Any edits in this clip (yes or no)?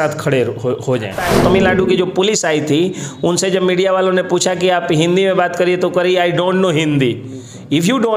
yes